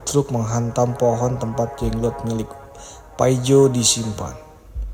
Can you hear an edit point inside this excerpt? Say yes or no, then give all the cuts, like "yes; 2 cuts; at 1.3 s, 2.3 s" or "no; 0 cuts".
no; 0 cuts